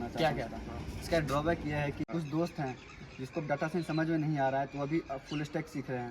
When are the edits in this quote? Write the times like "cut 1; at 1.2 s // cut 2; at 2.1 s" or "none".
cut 1; at 2.1 s